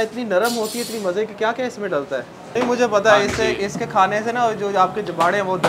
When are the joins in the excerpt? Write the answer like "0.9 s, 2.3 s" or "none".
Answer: 2.5 s